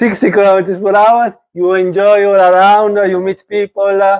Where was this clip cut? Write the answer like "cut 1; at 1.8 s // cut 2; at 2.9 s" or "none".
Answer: none